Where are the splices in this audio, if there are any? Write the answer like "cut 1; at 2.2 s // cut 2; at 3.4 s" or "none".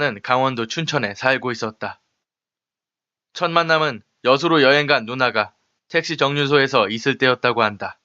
cut 1; at 7.0 s